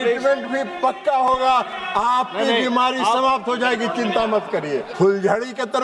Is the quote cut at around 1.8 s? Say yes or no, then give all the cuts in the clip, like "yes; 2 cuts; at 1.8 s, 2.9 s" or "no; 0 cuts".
no; 1 cut; at 4.9 s